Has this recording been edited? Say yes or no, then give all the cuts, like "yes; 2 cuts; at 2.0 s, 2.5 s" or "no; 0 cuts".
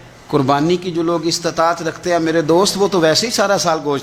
no; 0 cuts